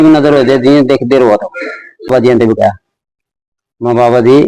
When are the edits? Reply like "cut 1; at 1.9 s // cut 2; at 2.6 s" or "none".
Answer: cut 1; at 2.1 s